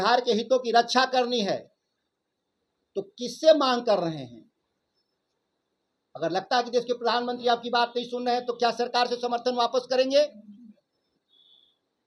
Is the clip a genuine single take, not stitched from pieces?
yes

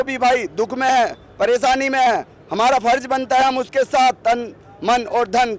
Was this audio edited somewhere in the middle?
no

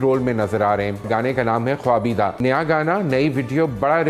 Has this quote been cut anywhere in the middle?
yes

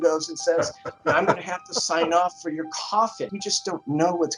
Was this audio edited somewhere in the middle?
yes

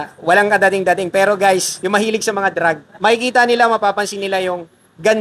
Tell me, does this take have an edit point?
yes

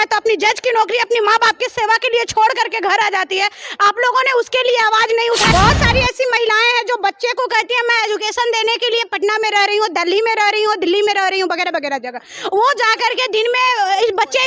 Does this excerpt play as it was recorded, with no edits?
no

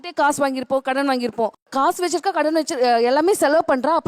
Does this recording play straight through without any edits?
no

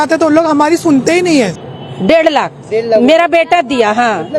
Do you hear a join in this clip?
yes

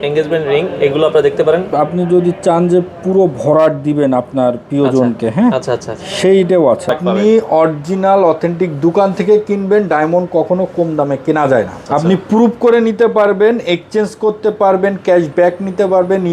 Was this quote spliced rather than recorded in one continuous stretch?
yes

